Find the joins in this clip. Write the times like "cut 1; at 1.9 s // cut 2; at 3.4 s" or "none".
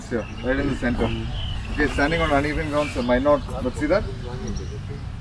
none